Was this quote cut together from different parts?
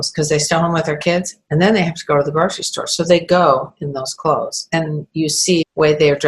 yes; 1 cut; at 4.6 s

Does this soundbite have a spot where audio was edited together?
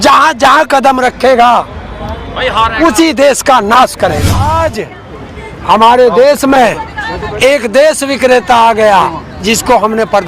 yes; 1 cut; at 4.4 s

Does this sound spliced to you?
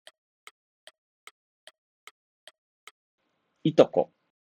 no; 0 cuts

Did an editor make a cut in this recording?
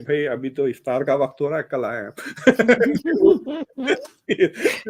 no; 0 cuts

